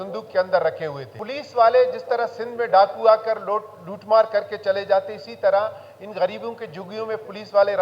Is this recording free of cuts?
no; 1 cut; at 1.3 s

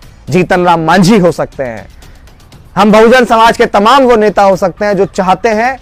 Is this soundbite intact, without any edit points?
yes; 0 cuts

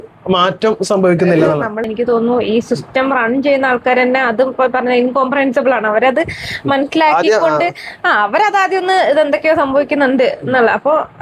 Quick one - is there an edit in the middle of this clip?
yes; 1 cut; at 1.8 s

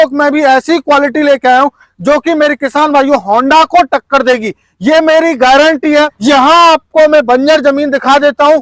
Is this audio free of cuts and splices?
no; 1 cut; at 6.2 s

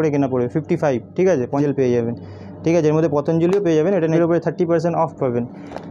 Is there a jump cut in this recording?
yes; 2 cuts; at 1.6 s, 4.1 s

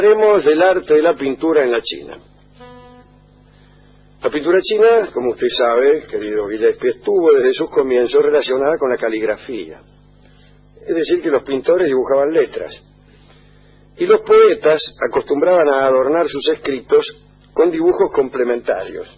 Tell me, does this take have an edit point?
no; 0 cuts

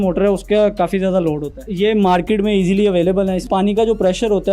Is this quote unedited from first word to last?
no; 2 cuts; at 1.6 s, 3.4 s

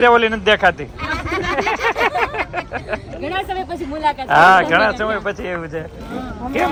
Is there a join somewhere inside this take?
no; 0 cuts

